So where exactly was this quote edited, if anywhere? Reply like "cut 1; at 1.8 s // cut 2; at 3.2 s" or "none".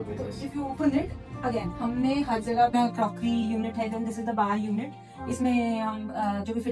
cut 1; at 2.7 s